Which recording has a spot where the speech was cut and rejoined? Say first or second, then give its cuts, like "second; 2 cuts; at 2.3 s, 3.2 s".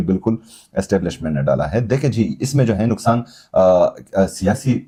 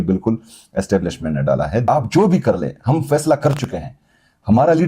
second; 1 cut; at 1.8 s